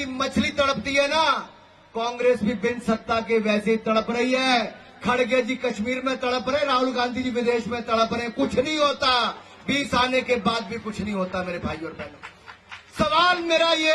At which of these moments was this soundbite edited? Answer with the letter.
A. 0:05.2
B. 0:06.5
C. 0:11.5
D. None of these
D